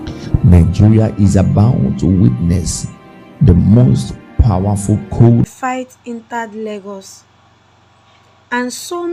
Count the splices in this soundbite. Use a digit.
1